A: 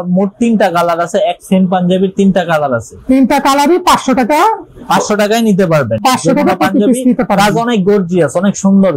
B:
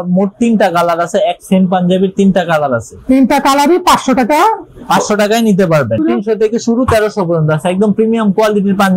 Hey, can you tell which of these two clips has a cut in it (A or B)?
B